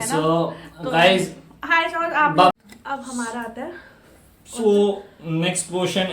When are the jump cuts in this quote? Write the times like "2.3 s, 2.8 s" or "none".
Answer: 2.5 s